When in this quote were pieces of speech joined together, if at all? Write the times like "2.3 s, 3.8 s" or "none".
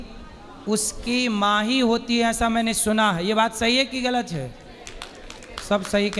none